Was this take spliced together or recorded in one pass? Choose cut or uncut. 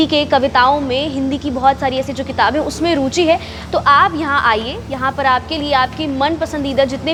uncut